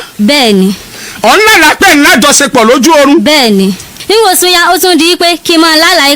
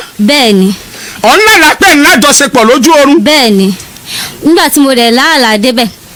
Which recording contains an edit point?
first; 1 cut; at 3.9 s

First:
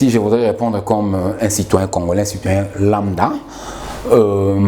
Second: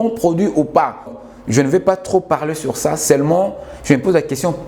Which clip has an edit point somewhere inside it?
second; 1 cut; at 1.2 s

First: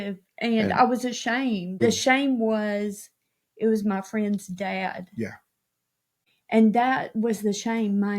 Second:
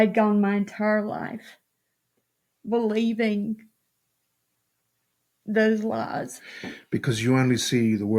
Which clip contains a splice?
first; 2 cuts; at 1.8 s, 5.8 s

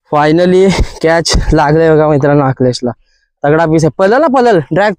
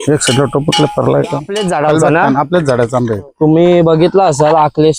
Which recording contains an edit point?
second; 1 cut; at 1.5 s

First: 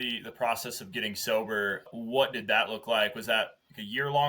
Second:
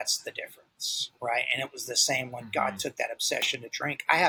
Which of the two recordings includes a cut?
first; 1 cut; at 1.9 s

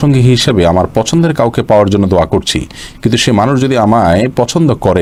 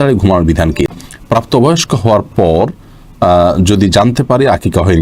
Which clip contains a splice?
second; 1 cut; at 0.9 s

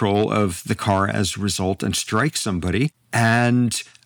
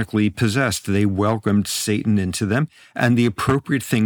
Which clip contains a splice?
first; 1 cut; at 3.0 s

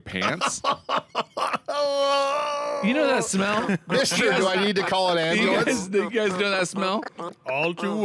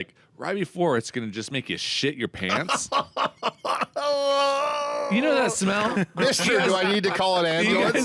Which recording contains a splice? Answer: first; 1 cut; at 7.1 s

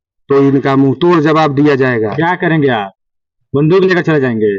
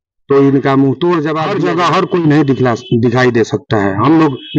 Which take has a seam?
second; 1 cut; at 1.4 s

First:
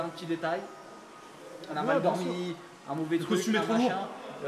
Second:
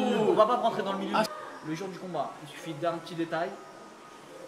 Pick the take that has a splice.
second; 1 cut; at 1.3 s

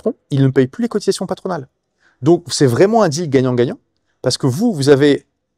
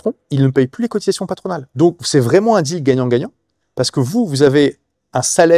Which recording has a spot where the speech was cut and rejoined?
second; 1 cut; at 1.6 s

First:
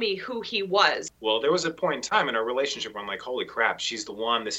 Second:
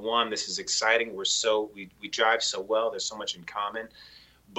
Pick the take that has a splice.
first; 1 cut; at 1.0 s

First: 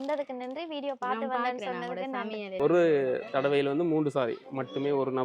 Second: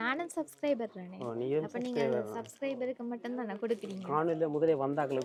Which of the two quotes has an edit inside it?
first; 1 cut; at 2.6 s

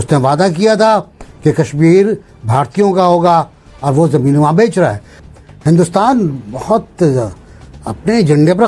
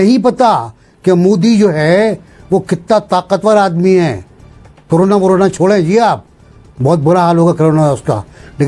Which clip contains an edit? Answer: first; 1 cut; at 5.1 s

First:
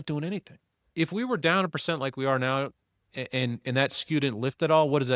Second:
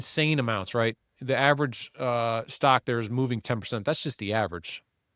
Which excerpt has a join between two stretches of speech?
first; 1 cut; at 0.9 s

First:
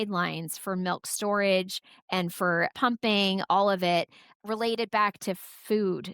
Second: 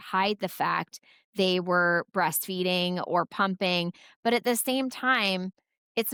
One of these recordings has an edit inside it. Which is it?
first; 2 cuts; at 2.7 s, 4.4 s

